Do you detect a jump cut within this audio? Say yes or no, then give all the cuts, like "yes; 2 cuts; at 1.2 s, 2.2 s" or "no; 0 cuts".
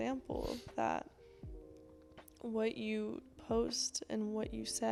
no; 0 cuts